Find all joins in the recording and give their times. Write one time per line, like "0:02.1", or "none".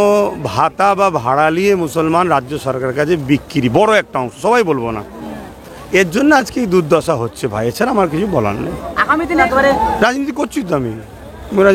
0:09.4